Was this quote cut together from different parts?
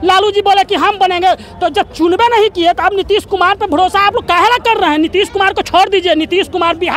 no; 0 cuts

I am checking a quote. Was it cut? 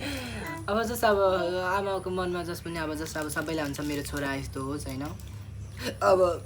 no; 0 cuts

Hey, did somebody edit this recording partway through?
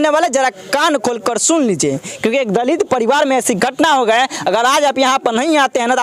no; 0 cuts

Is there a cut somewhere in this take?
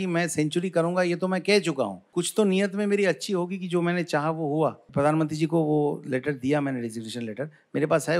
yes; 2 cuts; at 2.0 s, 4.8 s

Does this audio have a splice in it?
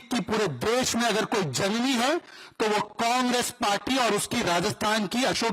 no; 0 cuts

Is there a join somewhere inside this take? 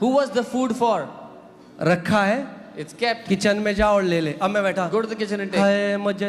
no; 0 cuts

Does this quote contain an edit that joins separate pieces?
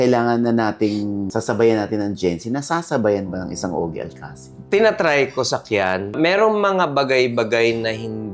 yes; 2 cuts; at 1.3 s, 6.1 s

